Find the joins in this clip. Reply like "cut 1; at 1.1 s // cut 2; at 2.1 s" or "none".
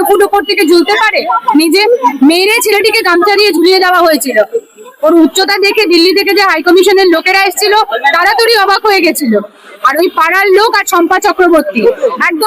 none